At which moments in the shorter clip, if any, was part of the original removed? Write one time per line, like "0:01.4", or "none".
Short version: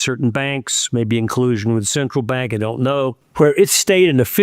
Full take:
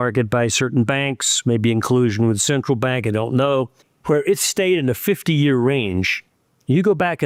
0:03.2